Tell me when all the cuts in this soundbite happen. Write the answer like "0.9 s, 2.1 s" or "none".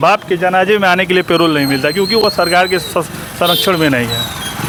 none